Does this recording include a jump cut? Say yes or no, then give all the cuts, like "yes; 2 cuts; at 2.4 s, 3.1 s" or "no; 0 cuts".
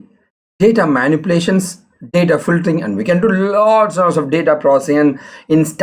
no; 0 cuts